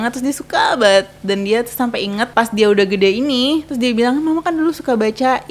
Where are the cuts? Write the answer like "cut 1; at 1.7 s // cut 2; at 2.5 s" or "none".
cut 1; at 2.3 s